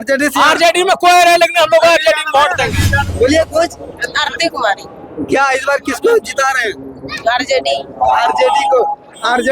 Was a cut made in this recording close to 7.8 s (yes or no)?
no